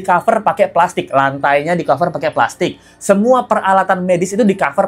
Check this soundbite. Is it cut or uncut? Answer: uncut